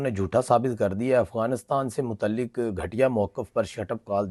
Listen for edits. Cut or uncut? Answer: uncut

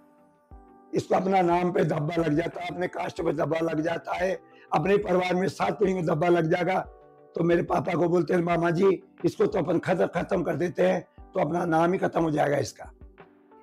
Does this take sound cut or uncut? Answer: uncut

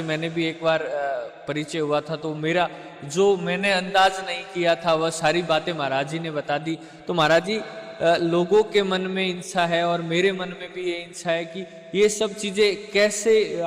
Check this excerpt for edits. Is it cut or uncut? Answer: uncut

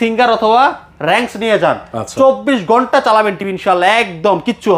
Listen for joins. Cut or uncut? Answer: uncut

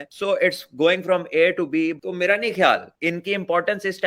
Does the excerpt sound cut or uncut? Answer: cut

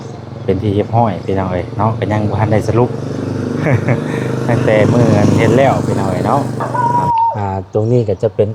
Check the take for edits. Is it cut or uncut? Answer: cut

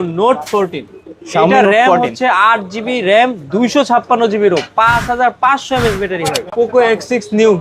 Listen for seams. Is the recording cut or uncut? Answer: cut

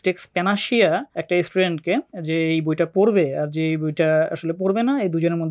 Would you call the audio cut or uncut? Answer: cut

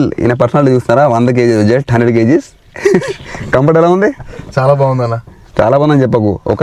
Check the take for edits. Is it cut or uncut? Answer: uncut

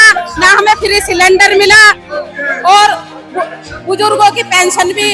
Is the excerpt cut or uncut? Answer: uncut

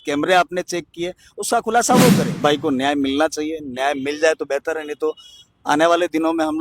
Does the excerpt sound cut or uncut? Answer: cut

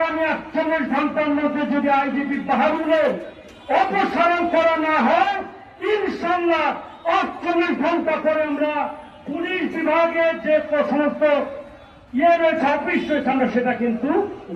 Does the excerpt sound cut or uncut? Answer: uncut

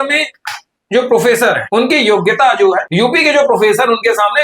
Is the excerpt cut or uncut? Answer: cut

